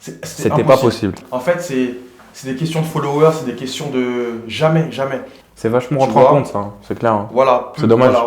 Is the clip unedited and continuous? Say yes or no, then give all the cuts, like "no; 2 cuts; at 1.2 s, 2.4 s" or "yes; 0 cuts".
no; 2 cuts; at 1.2 s, 5.4 s